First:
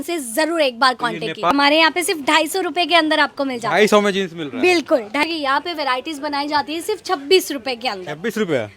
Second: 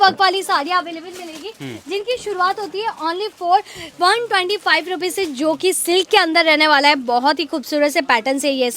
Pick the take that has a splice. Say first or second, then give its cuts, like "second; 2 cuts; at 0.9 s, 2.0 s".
first; 2 cuts; at 1.5 s, 5.2 s